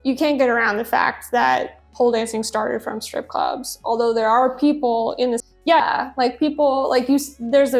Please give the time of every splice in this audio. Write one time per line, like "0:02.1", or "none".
0:05.8